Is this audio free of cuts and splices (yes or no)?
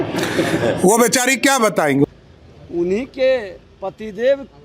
no